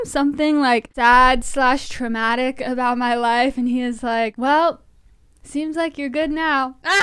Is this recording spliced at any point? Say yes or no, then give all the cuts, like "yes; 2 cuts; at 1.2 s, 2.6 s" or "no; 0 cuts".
yes; 2 cuts; at 0.9 s, 4.3 s